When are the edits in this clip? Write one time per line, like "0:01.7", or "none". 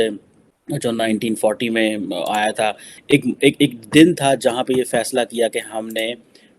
0:02.9